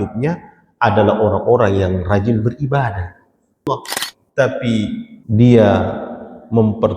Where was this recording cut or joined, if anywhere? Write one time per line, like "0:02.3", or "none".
0:03.7
0:05.1